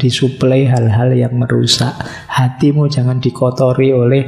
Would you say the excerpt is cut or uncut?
uncut